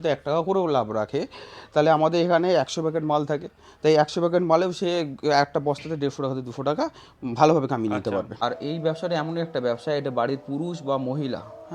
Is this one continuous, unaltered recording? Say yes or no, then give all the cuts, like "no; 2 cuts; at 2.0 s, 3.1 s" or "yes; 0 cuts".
no; 1 cut; at 8.3 s